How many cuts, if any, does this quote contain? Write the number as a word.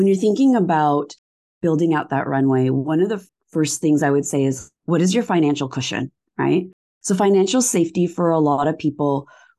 two